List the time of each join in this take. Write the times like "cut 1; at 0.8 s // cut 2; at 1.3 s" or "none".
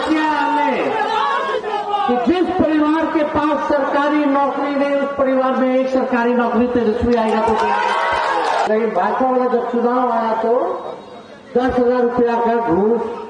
cut 1; at 8.7 s